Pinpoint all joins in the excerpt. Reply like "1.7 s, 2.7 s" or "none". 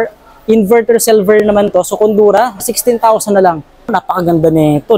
2.6 s, 3.9 s